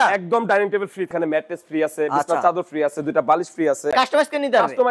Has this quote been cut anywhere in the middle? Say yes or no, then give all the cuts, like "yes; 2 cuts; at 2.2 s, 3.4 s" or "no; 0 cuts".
yes; 2 cuts; at 1.1 s, 3.9 s